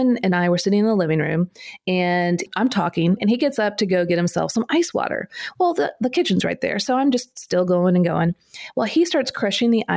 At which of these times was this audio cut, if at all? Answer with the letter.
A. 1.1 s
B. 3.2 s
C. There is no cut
B